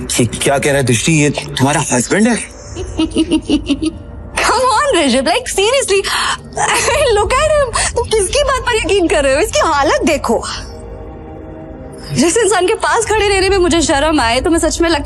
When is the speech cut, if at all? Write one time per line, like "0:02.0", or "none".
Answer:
0:02.9